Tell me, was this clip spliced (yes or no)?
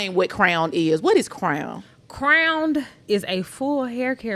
yes